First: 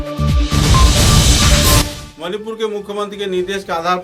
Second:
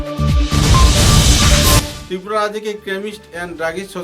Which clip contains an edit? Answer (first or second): second